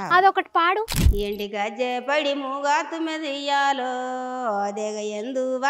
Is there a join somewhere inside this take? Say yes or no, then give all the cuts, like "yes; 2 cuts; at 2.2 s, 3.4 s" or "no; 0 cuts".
yes; 1 cut; at 1.0 s